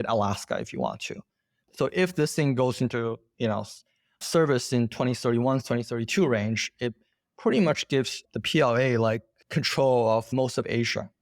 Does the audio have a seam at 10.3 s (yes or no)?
yes